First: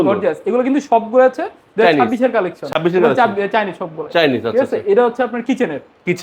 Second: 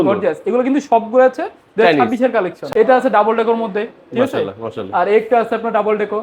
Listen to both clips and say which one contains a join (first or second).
second